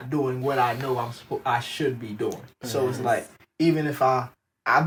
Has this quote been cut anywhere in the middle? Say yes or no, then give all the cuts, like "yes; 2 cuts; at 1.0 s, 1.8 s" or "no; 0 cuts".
no; 0 cuts